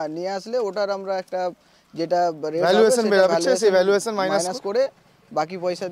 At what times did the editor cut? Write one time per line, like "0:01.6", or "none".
none